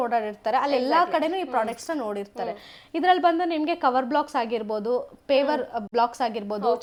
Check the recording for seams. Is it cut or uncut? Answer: uncut